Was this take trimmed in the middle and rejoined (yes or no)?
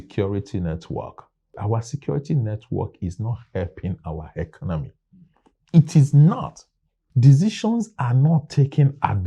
yes